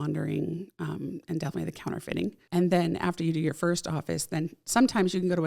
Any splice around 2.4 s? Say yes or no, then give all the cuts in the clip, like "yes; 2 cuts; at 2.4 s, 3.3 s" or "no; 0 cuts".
yes; 1 cut; at 2.4 s